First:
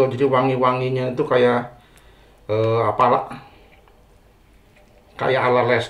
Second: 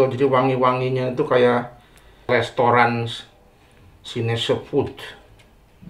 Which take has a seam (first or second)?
second